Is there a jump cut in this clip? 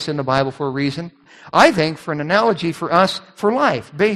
yes; 1 cut; at 1.3 s

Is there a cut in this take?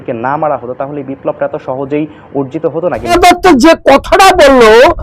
yes; 1 cut; at 3.1 s

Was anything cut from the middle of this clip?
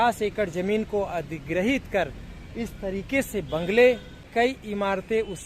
yes; 1 cut; at 4.3 s

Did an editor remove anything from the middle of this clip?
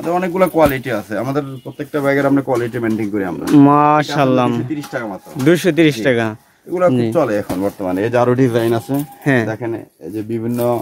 no; 0 cuts

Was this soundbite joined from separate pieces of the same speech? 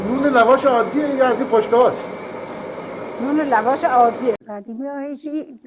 yes; 1 cut; at 4.4 s

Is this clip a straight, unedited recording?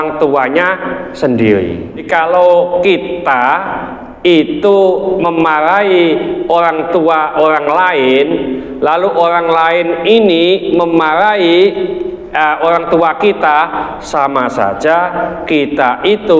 no; 1 cut; at 2.1 s

